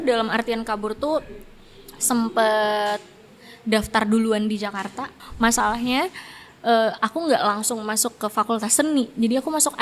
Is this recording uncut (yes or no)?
no